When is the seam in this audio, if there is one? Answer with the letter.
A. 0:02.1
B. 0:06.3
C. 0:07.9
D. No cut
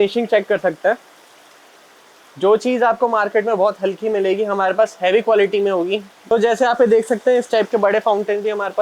B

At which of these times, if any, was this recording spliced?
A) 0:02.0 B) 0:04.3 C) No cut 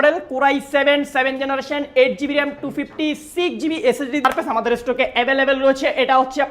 B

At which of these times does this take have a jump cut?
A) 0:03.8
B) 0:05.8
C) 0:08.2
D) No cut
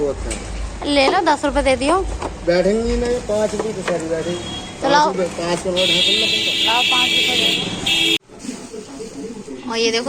C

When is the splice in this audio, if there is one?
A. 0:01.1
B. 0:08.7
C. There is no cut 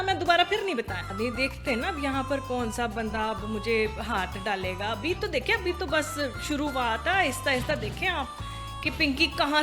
A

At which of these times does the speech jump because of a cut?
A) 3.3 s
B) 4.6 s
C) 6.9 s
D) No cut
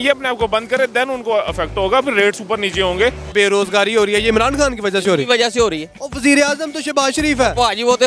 A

